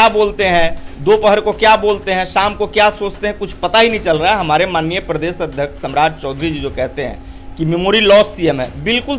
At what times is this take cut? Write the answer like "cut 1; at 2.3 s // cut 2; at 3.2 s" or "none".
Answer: none